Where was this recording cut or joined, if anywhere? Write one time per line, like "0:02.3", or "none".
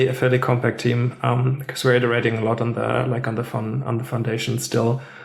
none